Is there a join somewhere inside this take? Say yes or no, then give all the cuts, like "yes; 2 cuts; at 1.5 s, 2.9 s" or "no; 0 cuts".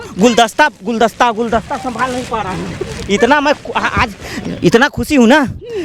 no; 0 cuts